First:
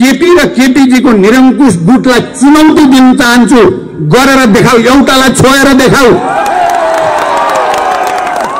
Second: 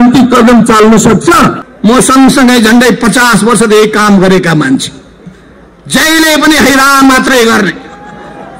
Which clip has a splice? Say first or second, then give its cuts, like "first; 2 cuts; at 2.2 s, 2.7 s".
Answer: second; 1 cut; at 1.7 s